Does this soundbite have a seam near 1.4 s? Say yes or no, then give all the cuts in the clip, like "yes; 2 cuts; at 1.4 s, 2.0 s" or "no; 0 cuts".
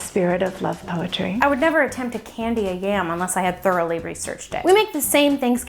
yes; 2 cuts; at 1.4 s, 4.6 s